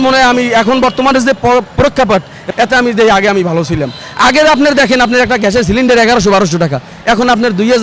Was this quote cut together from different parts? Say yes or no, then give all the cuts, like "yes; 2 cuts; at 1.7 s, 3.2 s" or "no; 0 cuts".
yes; 1 cut; at 2.4 s